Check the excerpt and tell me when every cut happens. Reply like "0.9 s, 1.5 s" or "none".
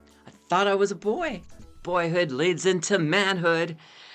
1.7 s